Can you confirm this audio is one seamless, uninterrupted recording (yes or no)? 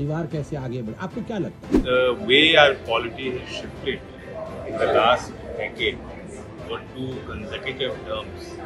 no